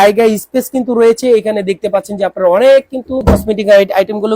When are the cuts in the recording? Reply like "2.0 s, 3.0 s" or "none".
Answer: 3.2 s